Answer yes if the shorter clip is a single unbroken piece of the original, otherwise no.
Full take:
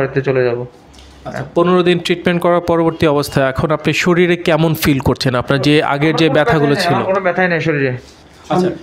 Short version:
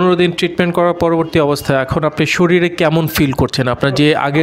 yes